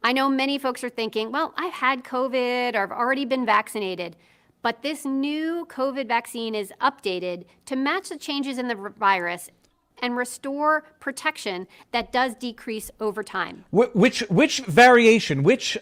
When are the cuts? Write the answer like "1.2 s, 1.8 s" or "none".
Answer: none